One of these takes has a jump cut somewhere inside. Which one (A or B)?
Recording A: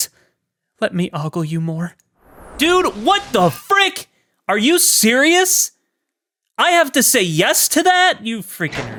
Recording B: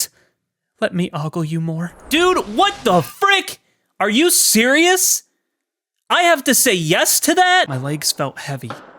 B